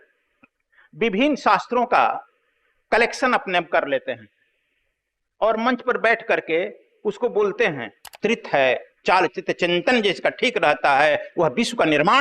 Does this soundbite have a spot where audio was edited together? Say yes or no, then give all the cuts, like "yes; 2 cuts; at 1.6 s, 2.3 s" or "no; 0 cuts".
yes; 1 cut; at 8.1 s